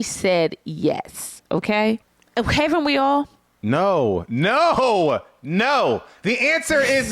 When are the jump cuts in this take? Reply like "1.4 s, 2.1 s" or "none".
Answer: 2.0 s